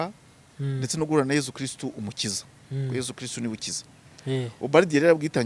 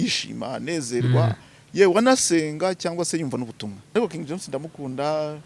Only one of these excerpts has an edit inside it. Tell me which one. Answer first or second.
second